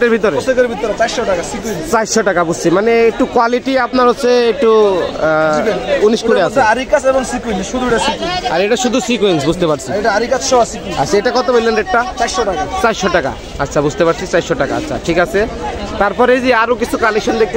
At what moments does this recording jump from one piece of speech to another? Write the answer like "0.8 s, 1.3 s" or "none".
none